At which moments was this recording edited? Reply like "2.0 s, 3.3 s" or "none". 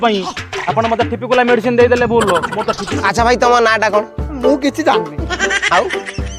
2.9 s